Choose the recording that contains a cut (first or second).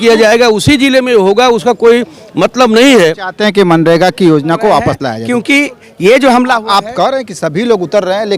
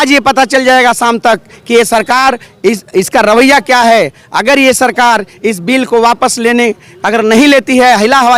first